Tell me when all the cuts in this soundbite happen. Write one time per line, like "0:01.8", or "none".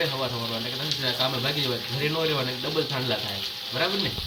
none